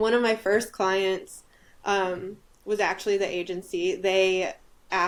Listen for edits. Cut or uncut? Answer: uncut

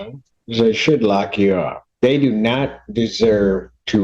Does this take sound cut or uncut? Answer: cut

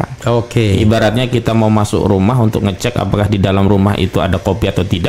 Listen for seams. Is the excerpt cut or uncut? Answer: uncut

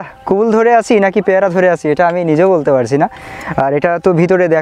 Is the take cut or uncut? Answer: uncut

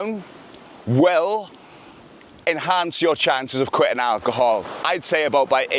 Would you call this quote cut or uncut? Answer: uncut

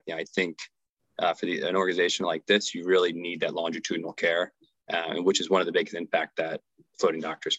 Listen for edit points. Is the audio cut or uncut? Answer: uncut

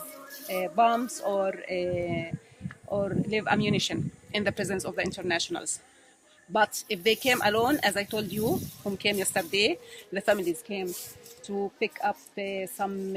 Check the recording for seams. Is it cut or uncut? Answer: uncut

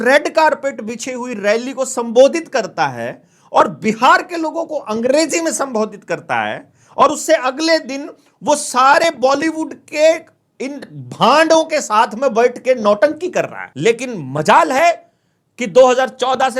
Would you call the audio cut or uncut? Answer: cut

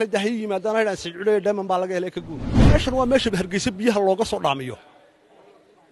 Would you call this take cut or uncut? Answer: cut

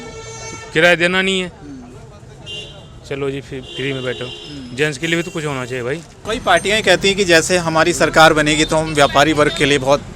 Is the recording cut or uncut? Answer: cut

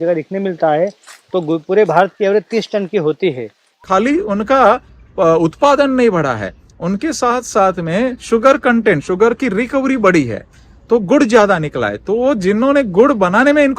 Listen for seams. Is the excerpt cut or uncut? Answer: cut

